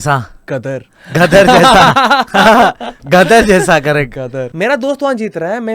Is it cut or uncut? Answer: cut